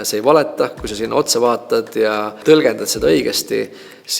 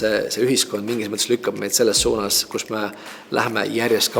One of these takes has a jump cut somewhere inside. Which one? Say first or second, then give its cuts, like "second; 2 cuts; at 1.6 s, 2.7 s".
first; 1 cut; at 2.4 s